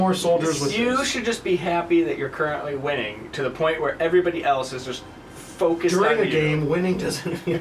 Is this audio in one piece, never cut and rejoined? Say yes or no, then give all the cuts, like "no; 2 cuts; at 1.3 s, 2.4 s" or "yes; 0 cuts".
yes; 0 cuts